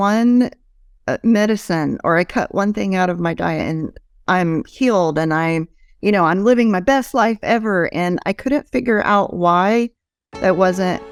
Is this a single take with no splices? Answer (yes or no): yes